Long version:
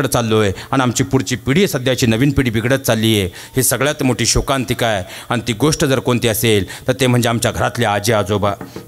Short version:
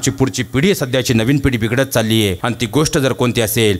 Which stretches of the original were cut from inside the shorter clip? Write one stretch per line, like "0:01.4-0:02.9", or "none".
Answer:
0:03.3-0:05.3